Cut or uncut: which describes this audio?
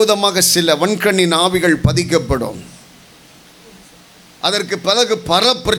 uncut